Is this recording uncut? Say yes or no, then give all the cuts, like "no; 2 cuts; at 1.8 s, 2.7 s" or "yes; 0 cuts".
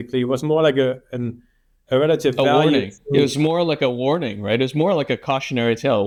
yes; 0 cuts